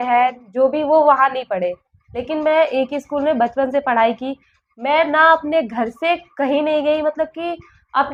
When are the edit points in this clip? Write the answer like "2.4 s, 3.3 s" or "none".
none